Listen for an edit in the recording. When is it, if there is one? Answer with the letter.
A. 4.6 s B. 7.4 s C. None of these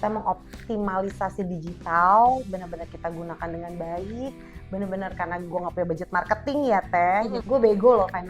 B